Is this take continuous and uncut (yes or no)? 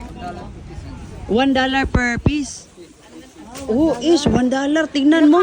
yes